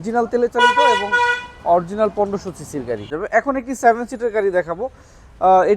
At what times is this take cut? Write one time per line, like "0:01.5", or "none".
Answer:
0:03.2

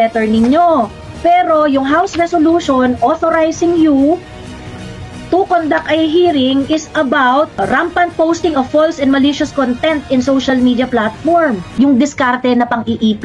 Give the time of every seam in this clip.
0:11.6

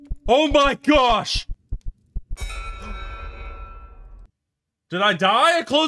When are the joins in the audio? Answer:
0:01.6

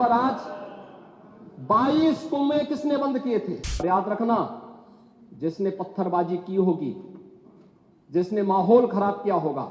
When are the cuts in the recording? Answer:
0:03.8

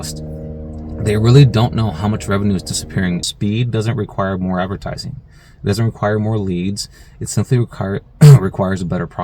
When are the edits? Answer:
0:03.3

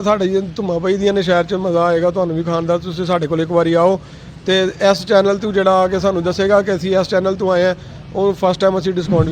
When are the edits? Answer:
none

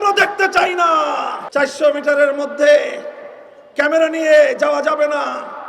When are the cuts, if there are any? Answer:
0:01.4

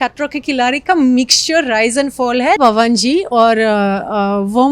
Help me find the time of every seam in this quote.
0:02.6

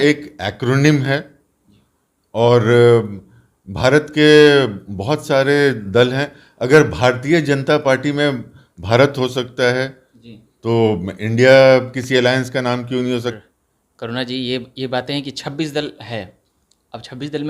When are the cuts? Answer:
0:13.4

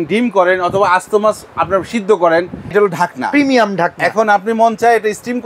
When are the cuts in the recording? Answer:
0:02.7

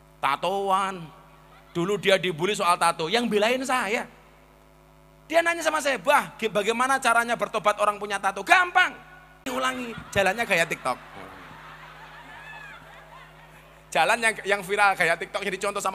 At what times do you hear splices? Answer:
0:09.4

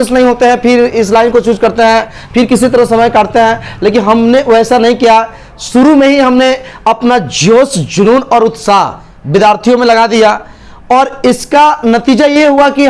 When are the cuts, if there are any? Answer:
none

